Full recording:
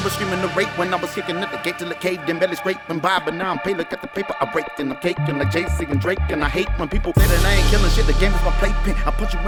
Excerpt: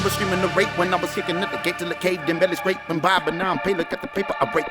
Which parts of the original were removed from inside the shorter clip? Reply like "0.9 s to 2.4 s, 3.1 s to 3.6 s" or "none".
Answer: none